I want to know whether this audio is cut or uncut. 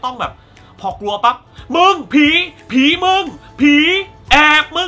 uncut